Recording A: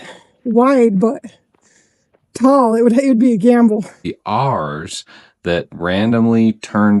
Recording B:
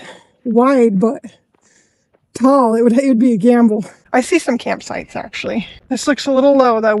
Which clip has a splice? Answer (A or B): A